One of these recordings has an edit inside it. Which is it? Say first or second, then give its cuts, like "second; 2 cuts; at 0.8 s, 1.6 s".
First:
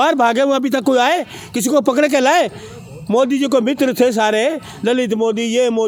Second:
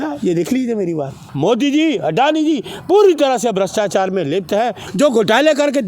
second; 2 cuts; at 1.2 s, 4.8 s